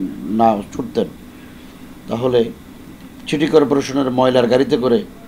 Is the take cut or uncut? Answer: uncut